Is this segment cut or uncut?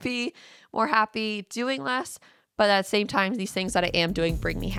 uncut